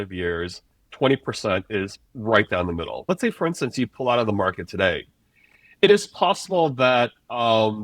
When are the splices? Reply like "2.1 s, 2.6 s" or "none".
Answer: 3.1 s